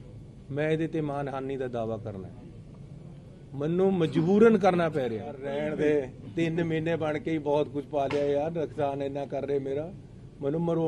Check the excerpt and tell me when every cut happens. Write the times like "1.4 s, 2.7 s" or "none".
5.5 s